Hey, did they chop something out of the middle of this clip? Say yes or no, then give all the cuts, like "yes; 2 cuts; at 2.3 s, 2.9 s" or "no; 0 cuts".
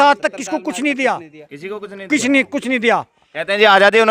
no; 0 cuts